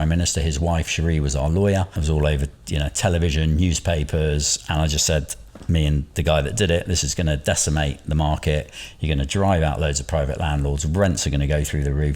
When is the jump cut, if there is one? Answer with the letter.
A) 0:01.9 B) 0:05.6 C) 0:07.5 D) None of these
A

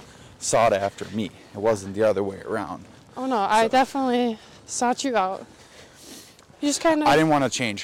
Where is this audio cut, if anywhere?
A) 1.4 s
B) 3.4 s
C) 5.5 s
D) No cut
C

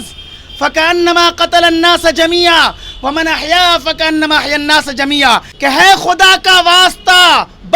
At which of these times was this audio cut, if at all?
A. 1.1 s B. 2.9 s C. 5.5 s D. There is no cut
C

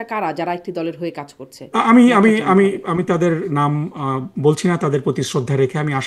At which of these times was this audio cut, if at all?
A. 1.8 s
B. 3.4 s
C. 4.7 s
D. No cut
D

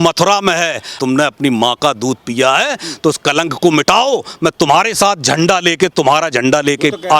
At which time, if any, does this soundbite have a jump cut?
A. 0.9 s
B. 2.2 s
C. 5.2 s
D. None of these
A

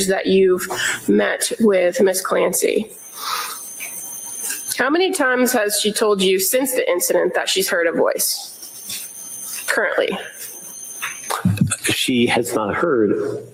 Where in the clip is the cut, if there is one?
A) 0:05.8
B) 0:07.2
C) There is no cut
C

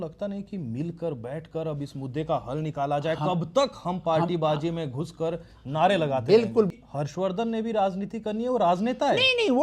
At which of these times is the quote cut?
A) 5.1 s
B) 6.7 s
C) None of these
B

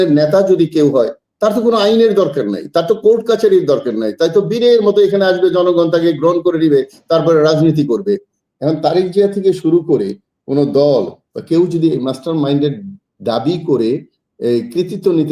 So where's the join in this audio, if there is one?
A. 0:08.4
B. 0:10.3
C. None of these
A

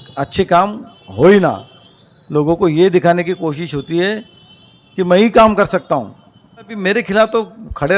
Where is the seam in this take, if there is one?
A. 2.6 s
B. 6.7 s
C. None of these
B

